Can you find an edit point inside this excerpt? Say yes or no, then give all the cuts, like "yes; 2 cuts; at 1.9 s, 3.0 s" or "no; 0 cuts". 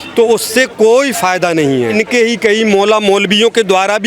yes; 1 cut; at 1.9 s